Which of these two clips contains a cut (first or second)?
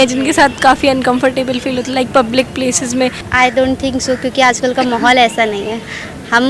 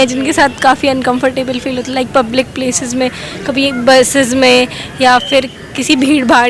first